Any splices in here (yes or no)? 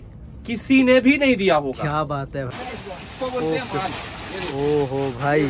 yes